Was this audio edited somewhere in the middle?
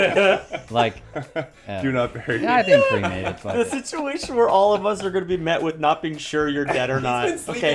no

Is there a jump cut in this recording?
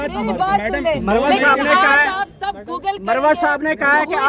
no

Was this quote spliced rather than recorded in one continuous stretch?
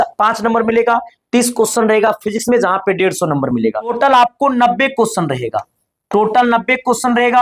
yes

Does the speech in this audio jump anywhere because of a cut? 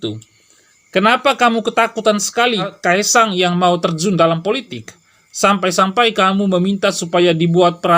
yes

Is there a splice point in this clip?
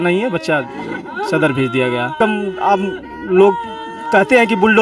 yes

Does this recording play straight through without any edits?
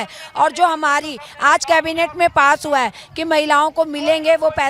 yes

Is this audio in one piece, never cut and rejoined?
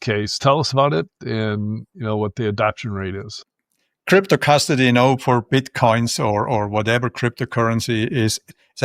yes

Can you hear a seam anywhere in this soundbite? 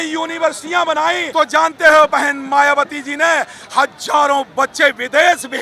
yes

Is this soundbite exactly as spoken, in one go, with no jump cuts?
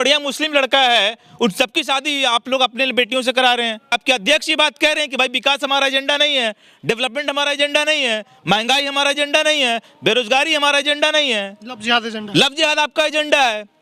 no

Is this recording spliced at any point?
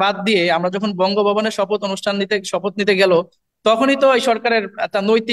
no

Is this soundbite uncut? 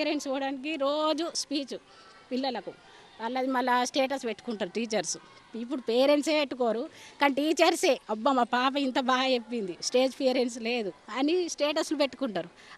yes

